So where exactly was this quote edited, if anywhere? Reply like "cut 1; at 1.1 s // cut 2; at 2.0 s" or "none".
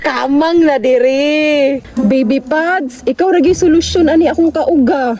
cut 1; at 1.9 s